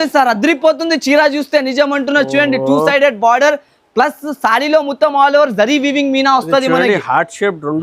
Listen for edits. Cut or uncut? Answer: uncut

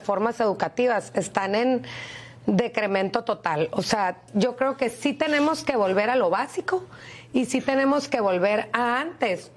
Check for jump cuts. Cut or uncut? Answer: cut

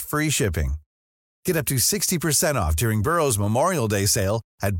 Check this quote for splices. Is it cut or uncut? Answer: uncut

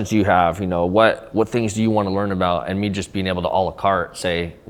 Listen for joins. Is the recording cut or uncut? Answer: uncut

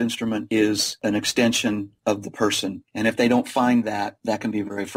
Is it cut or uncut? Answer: cut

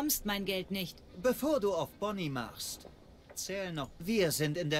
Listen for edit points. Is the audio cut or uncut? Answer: cut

